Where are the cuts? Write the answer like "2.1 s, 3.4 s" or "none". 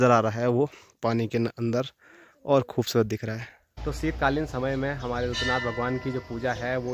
3.9 s